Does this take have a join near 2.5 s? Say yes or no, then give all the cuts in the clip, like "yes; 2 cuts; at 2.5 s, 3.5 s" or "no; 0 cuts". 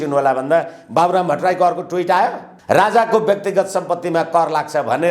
yes; 1 cut; at 2.5 s